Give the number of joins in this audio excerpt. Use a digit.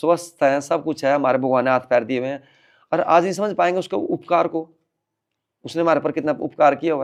0